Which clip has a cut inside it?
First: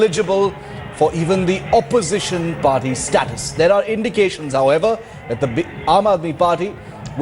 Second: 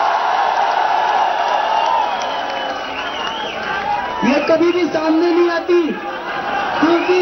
first; 1 cut; at 2.2 s

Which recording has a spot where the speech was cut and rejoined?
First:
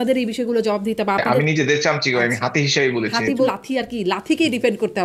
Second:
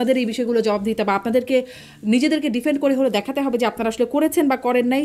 first; 2 cuts; at 1.3 s, 3.5 s

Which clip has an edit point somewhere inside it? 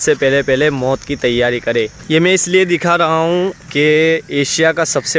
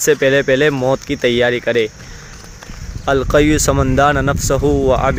first; 2 cuts; at 2.0 s, 3.6 s

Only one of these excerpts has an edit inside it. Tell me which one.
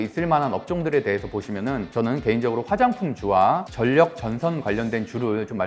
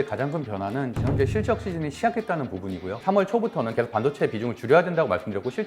second; 1 cut; at 3.0 s

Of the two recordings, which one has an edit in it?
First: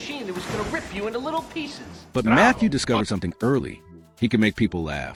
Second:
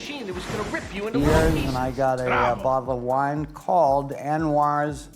second; 1 cut; at 1.1 s

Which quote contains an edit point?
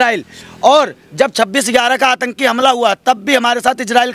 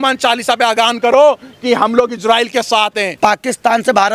second; 1 cut; at 3.1 s

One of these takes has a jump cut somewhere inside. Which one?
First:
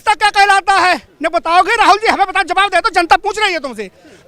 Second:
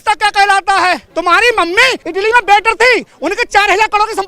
second; 2 cuts; at 1.1 s, 2.0 s

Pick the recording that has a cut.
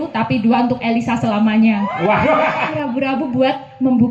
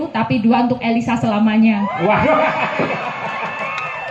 first; 1 cut; at 2.7 s

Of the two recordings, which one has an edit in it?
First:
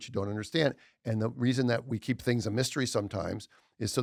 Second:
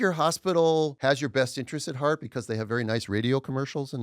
second; 1 cut; at 0.9 s

